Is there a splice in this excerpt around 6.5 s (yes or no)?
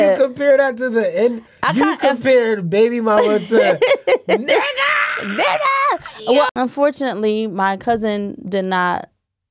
yes